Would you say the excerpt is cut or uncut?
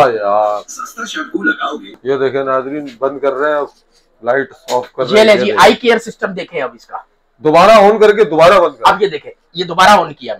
cut